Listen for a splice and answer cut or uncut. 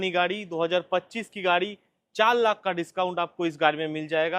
uncut